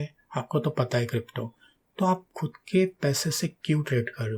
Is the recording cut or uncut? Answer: uncut